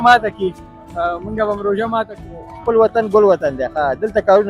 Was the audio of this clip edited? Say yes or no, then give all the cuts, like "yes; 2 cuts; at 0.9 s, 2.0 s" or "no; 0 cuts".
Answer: yes; 1 cut; at 2.5 s